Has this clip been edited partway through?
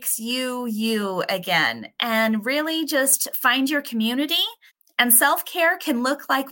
no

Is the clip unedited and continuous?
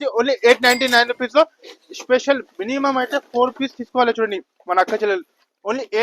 yes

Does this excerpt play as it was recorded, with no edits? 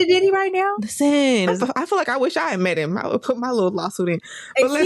no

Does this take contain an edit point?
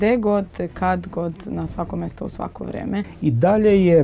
yes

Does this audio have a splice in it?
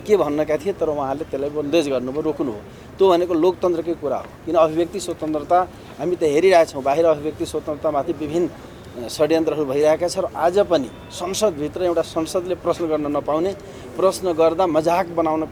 no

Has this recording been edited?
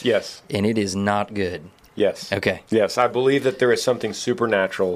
no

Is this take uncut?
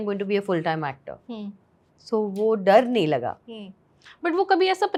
yes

